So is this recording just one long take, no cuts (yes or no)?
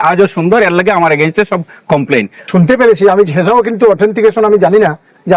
no